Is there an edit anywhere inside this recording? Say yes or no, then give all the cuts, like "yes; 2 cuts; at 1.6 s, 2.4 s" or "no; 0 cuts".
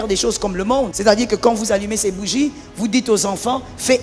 yes; 1 cut; at 0.9 s